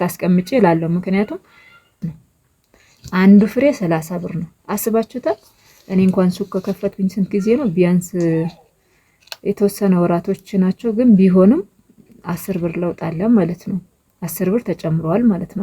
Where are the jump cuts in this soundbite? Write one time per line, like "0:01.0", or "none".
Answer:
0:02.0